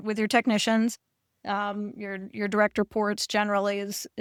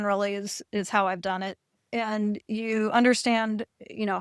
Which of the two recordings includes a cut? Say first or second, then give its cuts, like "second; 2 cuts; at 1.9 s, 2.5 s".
second; 1 cut; at 1.7 s